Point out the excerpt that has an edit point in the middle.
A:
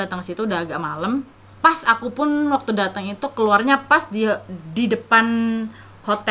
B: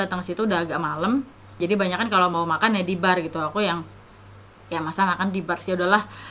A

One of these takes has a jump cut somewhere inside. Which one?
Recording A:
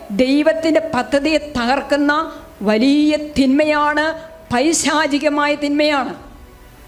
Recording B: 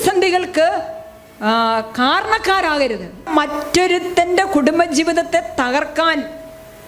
B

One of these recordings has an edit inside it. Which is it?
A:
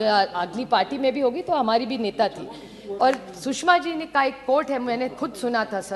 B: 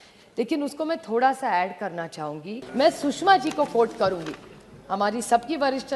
B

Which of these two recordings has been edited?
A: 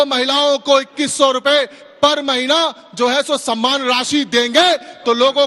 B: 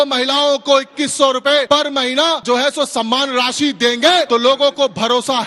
B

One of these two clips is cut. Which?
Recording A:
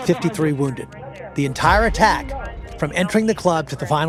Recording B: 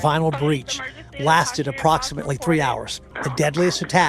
B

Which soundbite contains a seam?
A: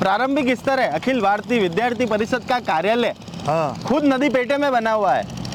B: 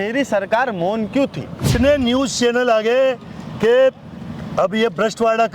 B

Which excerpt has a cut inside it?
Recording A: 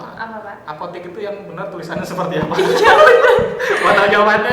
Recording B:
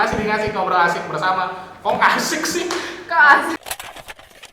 B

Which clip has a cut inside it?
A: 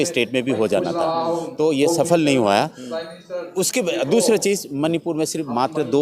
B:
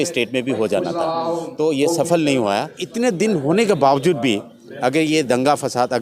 B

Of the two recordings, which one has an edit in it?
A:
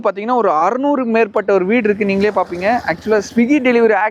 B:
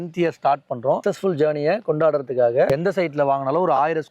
B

